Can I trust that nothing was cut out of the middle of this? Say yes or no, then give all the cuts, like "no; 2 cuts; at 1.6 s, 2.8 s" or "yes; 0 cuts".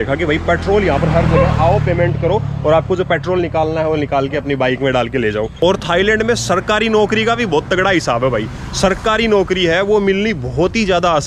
no; 1 cut; at 5.5 s